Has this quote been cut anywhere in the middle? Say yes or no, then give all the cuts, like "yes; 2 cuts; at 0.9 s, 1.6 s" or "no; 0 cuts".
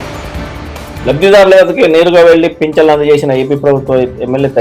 yes; 1 cut; at 1.0 s